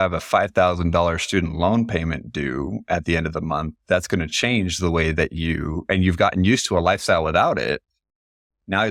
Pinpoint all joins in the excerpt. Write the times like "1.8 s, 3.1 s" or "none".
none